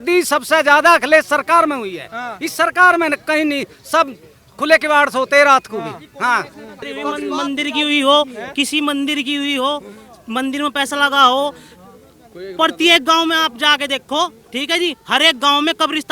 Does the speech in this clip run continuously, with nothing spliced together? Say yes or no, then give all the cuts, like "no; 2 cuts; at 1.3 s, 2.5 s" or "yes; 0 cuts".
no; 1 cut; at 6.8 s